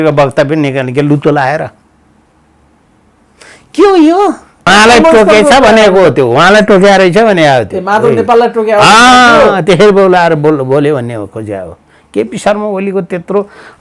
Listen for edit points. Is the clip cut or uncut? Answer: cut